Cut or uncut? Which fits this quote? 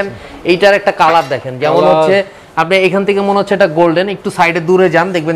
uncut